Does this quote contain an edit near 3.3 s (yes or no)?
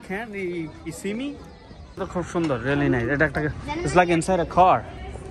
no